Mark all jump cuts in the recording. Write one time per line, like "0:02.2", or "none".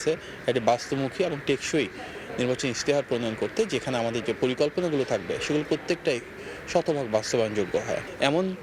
none